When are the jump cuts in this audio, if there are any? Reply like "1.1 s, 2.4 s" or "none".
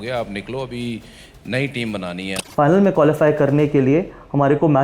2.5 s